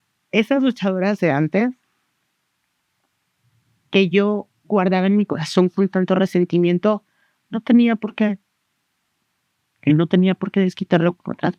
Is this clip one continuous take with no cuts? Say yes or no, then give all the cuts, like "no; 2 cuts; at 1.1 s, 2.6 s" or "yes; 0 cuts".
yes; 0 cuts